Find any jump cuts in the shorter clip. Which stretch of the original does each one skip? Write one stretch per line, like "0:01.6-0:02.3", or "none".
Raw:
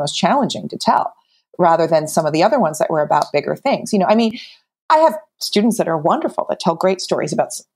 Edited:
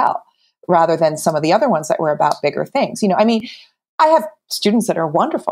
none